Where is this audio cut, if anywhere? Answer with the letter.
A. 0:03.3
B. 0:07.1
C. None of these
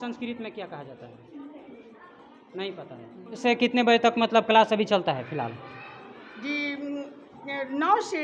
A